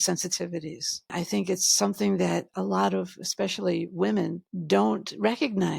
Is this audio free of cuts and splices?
no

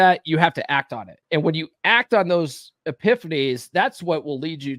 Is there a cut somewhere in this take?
yes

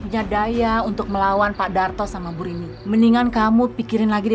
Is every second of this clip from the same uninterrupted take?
no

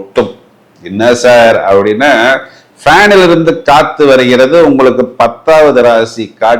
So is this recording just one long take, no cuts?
yes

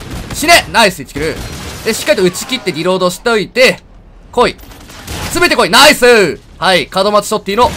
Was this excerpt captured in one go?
yes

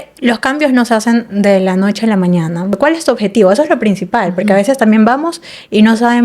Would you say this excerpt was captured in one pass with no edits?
no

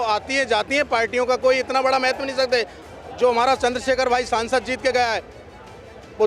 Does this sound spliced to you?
yes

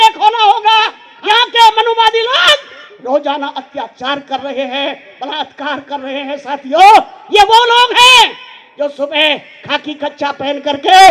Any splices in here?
yes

